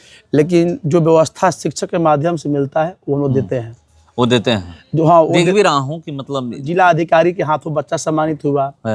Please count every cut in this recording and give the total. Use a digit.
1